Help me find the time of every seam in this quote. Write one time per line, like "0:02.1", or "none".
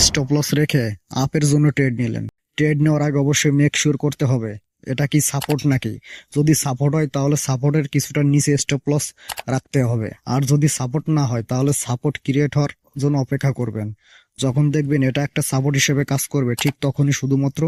none